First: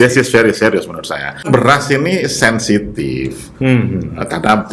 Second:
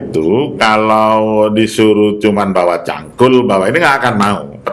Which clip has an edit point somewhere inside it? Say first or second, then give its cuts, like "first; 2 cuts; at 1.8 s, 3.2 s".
first; 1 cut; at 1.4 s